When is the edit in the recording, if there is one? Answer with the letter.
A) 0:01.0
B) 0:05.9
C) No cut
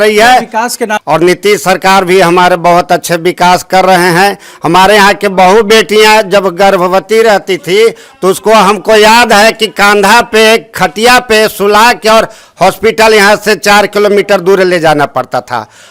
A